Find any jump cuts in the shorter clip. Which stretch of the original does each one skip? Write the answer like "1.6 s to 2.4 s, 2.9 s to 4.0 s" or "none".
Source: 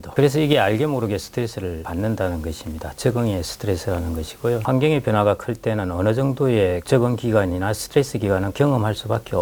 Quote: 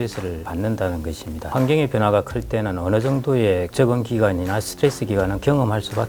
2.9 s to 4.6 s